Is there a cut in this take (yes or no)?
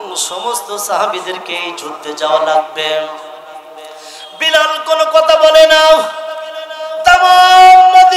no